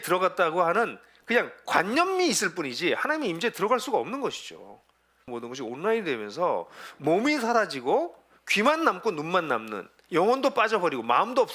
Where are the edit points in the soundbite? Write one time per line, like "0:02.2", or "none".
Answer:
0:05.3